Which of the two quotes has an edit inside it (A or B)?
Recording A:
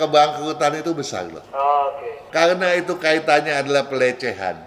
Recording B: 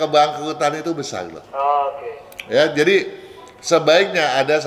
A